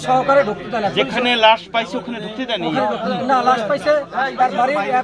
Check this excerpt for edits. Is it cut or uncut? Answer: uncut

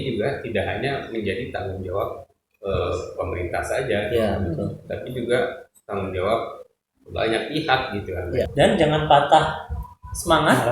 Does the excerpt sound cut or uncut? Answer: cut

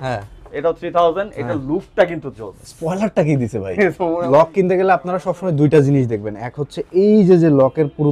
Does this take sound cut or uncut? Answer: cut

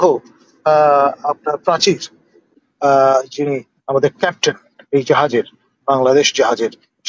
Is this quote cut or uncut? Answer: cut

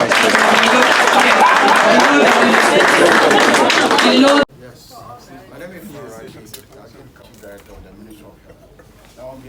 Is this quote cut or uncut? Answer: uncut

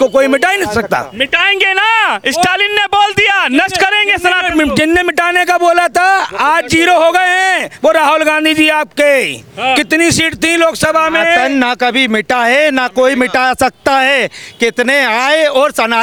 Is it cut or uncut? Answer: uncut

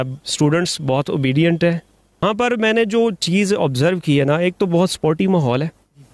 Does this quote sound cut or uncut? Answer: cut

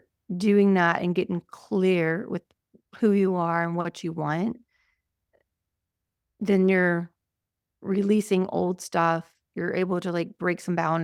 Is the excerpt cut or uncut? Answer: uncut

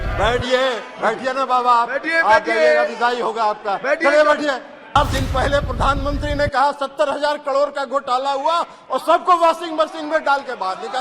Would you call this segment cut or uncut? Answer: cut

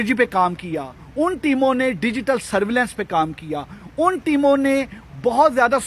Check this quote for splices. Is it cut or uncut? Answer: uncut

